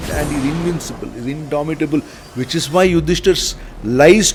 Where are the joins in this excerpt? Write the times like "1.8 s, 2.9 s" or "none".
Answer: none